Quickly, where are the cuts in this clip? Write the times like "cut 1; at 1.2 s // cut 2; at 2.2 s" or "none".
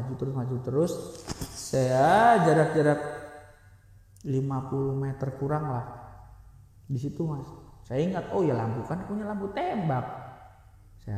none